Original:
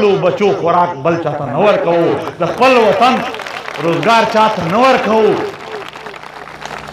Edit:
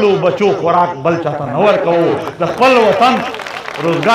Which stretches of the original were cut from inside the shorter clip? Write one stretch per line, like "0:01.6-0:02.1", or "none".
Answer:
none